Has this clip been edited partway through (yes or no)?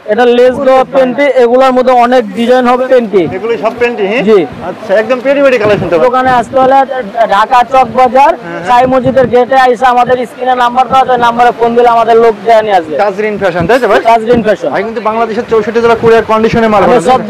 yes